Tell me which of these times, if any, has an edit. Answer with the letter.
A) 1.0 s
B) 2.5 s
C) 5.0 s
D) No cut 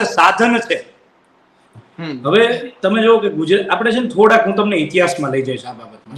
D